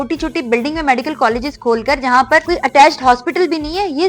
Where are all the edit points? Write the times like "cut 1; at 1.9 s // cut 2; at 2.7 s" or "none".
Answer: cut 1; at 2.4 s